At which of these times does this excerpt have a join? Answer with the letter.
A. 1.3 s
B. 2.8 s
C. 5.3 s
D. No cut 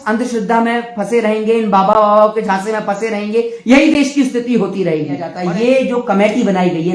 C